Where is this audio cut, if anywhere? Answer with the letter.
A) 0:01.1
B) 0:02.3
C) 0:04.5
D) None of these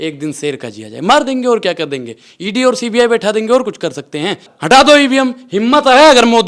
C